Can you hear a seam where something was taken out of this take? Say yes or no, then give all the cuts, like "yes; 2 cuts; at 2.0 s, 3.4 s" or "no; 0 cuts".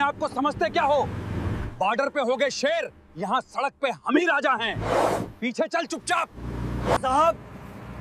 no; 0 cuts